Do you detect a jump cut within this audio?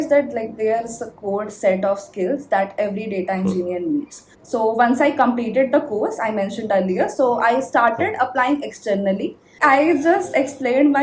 yes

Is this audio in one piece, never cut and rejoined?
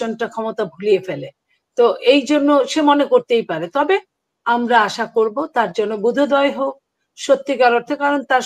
yes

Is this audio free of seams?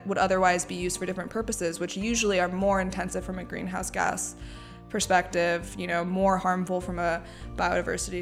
yes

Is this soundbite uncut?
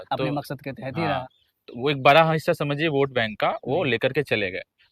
yes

